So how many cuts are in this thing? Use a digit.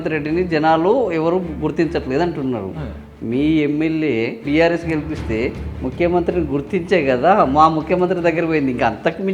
1